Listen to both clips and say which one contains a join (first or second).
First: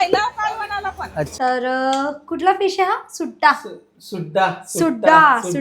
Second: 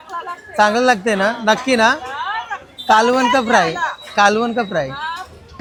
first